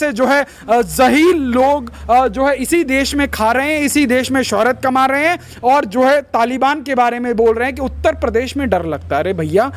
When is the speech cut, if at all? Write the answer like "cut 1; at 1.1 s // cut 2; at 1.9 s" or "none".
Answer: none